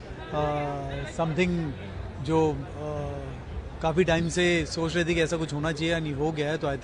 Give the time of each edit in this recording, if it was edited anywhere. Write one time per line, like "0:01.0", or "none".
none